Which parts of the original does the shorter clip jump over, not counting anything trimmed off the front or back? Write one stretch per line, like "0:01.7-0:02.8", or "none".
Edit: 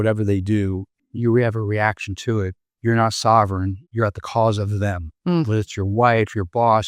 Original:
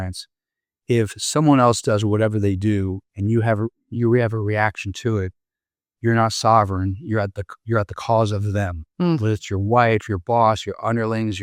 0:03.1-0:03.7
0:05.4-0:05.8
0:07.0-0:07.5